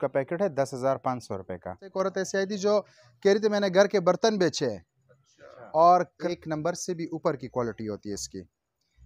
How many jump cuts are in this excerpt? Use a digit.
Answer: 2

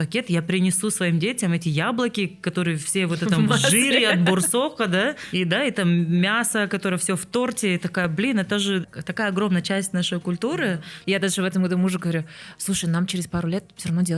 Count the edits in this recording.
3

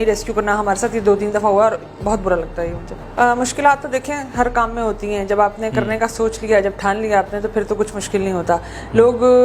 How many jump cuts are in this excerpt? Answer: 1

